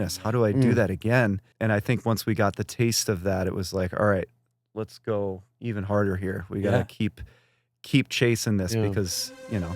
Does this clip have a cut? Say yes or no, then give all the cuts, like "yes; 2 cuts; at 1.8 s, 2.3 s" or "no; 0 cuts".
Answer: yes; 1 cut; at 1.5 s